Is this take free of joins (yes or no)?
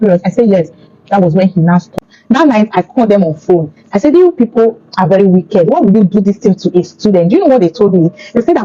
no